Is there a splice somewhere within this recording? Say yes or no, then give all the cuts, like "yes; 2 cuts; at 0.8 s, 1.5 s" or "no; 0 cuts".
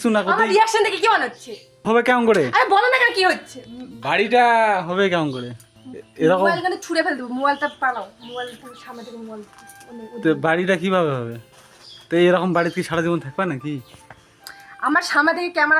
yes; 1 cut; at 1.8 s